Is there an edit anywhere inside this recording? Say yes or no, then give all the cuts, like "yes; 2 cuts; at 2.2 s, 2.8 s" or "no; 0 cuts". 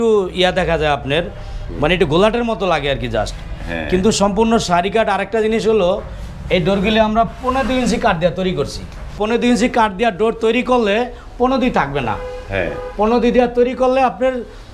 yes; 1 cut; at 9.1 s